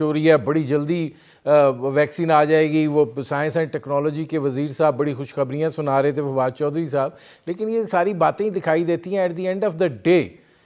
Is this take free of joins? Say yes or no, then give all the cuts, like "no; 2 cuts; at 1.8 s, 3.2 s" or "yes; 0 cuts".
yes; 0 cuts